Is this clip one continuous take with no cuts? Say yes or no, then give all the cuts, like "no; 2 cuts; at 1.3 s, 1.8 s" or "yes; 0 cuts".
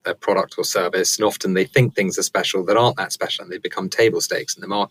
yes; 0 cuts